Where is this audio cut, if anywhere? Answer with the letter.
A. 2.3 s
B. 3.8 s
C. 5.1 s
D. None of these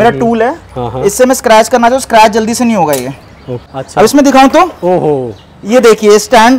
B